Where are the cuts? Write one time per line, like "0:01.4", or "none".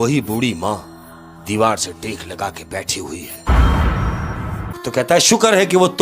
0:04.8